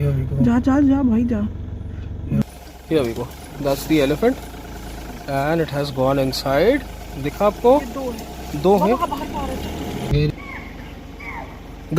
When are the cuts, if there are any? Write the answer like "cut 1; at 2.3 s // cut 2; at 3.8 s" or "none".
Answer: cut 1; at 2.4 s // cut 2; at 10.1 s